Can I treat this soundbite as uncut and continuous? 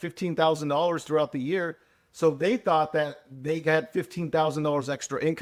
yes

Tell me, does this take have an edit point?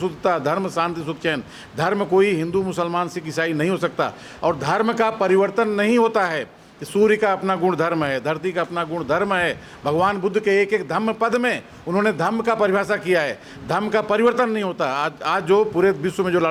no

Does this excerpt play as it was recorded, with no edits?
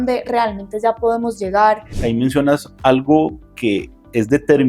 no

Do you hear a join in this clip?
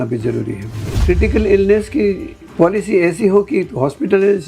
yes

